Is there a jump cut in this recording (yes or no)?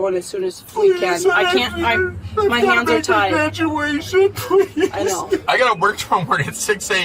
yes